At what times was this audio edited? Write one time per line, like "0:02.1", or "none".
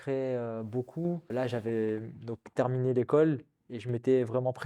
0:01.3